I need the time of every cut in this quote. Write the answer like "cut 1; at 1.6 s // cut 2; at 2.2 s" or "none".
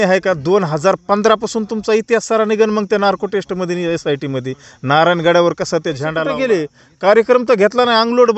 cut 1; at 6.2 s